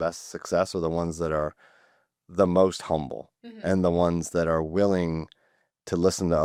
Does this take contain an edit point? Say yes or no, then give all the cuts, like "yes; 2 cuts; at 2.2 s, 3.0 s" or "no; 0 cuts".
no; 0 cuts